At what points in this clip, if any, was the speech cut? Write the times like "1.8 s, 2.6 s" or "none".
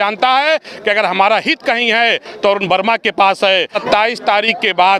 3.8 s